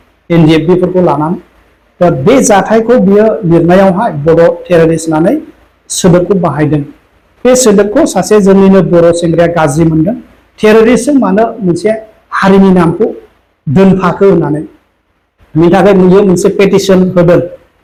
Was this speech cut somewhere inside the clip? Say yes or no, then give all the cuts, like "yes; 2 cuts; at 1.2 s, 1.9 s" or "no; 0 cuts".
no; 0 cuts